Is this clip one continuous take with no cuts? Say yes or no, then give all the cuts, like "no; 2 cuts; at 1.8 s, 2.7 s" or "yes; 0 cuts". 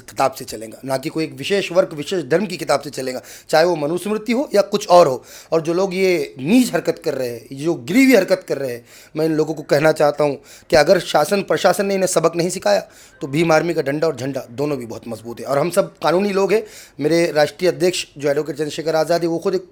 yes; 0 cuts